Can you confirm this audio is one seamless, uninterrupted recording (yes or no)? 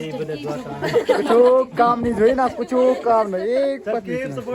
yes